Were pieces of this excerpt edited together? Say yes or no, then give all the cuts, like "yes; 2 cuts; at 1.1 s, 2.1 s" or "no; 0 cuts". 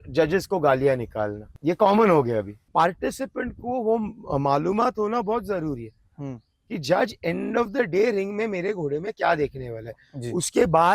yes; 2 cuts; at 1.4 s, 2.6 s